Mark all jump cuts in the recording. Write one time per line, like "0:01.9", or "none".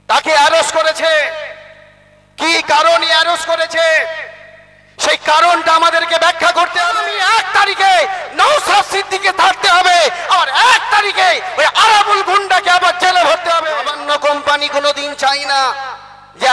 0:07.0
0:13.9